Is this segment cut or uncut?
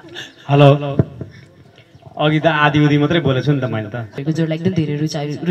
cut